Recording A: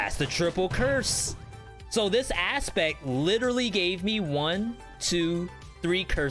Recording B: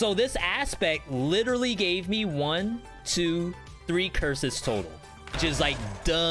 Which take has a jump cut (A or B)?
B